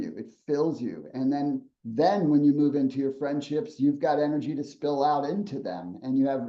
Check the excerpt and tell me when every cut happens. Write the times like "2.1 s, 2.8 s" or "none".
none